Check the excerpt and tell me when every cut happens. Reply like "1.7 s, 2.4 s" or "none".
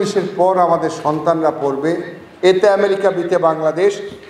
none

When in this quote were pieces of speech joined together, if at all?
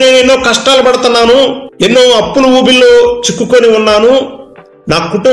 1.6 s

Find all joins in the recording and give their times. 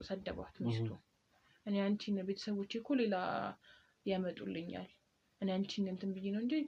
none

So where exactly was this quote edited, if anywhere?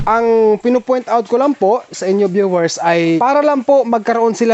3.2 s

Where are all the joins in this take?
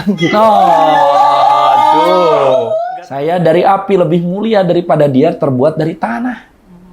2.7 s

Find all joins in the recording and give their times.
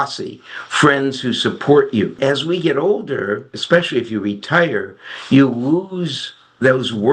2.2 s, 3.6 s

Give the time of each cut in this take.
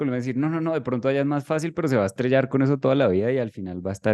none

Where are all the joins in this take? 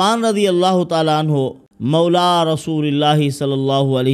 1.7 s

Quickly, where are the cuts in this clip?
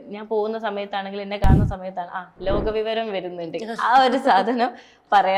none

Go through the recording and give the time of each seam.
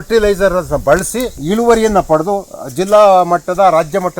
1.3 s

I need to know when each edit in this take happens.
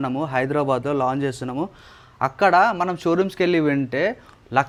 none

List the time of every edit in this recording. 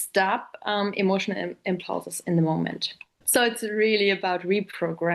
3.2 s

